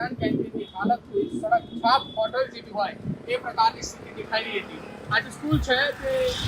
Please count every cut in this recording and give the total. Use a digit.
0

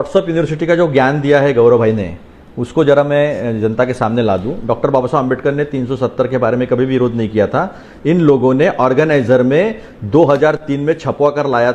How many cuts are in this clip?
0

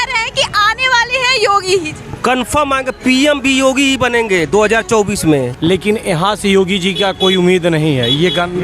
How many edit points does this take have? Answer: 1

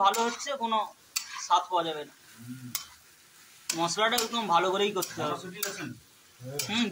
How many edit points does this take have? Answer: 0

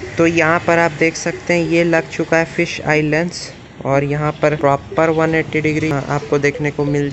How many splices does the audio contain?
2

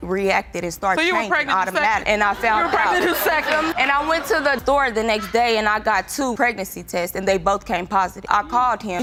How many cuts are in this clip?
0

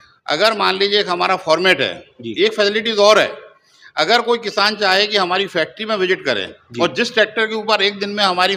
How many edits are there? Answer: 0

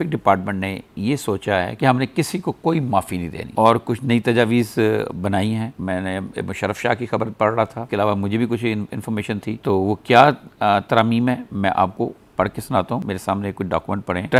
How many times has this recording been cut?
0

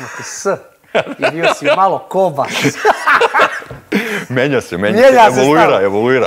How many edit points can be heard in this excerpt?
0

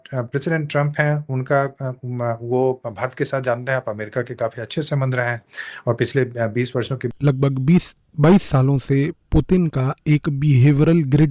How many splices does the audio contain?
1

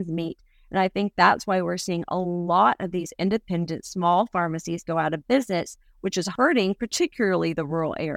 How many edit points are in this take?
1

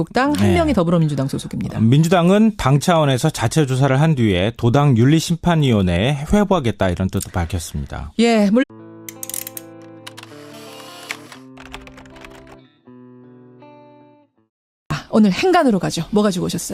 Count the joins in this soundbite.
0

